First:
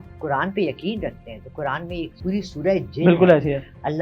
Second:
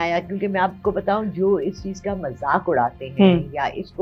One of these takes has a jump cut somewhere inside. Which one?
first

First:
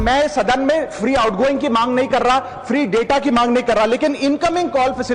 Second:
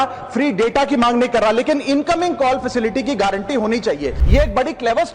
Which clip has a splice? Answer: second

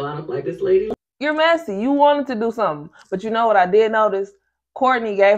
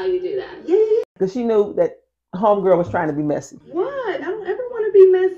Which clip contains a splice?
first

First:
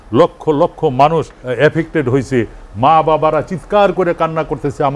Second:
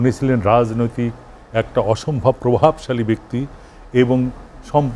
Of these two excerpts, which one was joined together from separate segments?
first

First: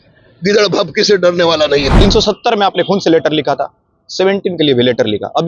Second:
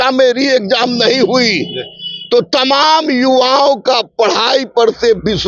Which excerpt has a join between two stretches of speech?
first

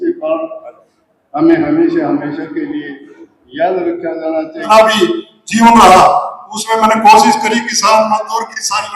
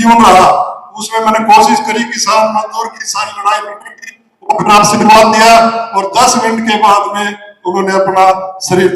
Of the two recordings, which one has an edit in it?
first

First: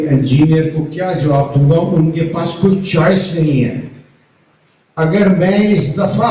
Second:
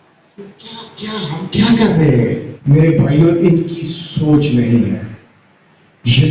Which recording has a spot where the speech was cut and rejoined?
second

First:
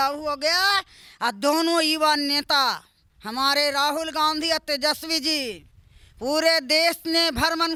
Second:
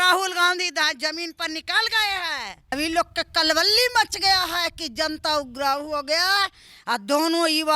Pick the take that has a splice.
second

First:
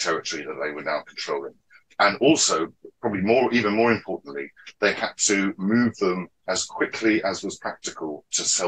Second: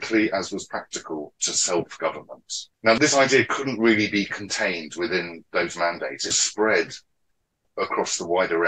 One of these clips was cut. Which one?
second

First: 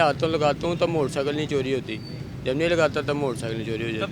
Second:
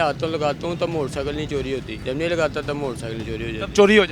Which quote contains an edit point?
second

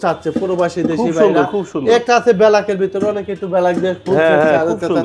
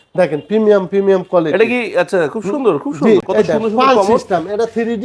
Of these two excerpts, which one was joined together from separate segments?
second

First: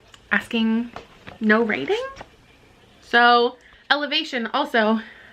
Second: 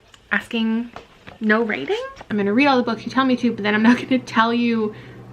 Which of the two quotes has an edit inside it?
second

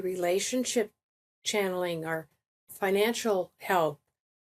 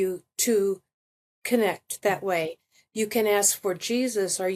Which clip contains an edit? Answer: first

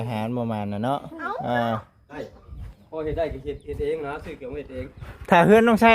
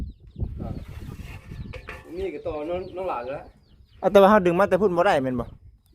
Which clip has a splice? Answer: first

